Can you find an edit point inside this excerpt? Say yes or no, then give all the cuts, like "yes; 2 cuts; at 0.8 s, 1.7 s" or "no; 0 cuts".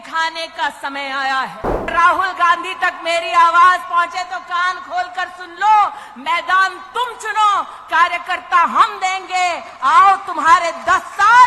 yes; 1 cut; at 1.9 s